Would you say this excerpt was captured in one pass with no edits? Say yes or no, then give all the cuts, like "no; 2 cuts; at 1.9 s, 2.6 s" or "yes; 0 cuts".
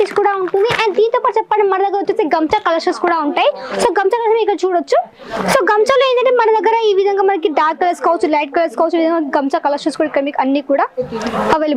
yes; 0 cuts